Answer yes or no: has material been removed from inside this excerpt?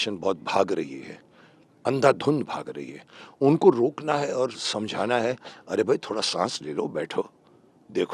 no